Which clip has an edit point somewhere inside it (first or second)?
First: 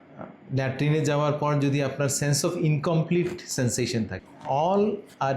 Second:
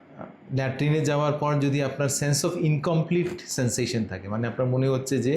first